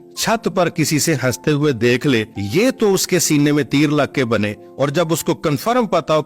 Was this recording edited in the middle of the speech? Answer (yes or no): yes